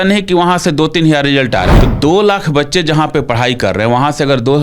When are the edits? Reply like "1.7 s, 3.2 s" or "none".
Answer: 1.7 s